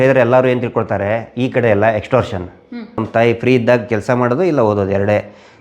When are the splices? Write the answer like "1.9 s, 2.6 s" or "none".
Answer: 3.0 s